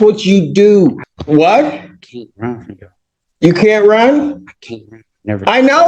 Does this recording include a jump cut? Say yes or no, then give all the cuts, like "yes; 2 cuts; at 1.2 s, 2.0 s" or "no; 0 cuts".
yes; 1 cut; at 1.1 s